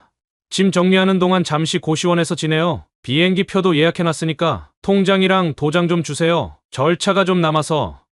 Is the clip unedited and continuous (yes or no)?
no